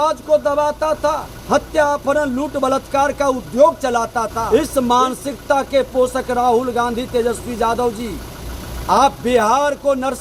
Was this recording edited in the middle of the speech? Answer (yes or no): yes